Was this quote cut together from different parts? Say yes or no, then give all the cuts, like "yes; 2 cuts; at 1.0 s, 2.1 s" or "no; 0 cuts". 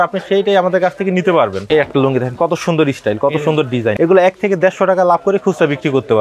yes; 2 cuts; at 1.6 s, 3.9 s